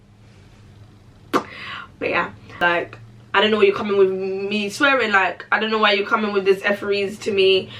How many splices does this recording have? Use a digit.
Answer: 0